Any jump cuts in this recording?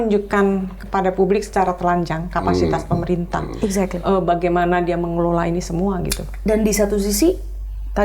no; 0 cuts

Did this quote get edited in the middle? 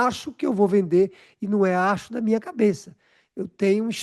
no; 0 cuts

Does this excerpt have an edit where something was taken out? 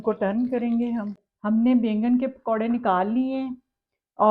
yes; 1 cut; at 1.2 s

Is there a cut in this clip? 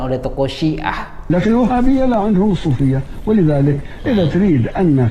yes; 1 cut; at 1.1 s

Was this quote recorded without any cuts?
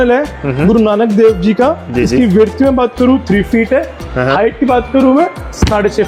yes; 0 cuts

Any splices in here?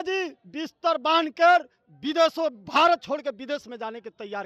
no; 0 cuts

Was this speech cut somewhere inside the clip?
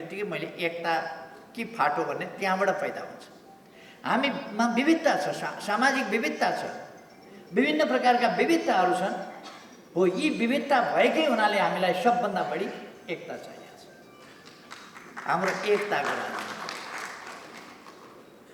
no; 0 cuts

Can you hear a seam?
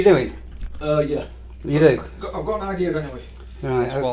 no; 0 cuts

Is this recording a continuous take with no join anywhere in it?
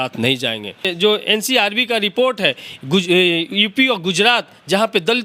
no; 1 cut; at 0.9 s

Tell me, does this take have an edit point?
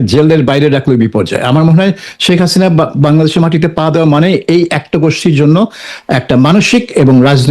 no; 0 cuts

